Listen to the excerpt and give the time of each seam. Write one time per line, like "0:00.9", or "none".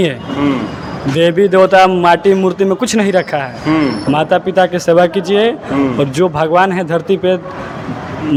none